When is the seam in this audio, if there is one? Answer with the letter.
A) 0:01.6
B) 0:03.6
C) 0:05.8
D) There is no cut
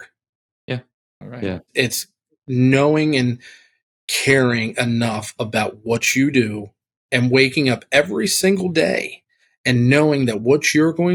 D